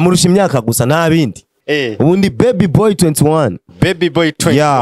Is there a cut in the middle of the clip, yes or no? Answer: yes